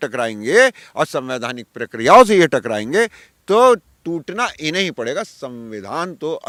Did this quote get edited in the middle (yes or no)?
no